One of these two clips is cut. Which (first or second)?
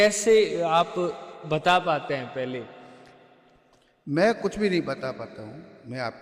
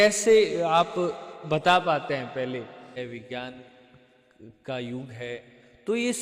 second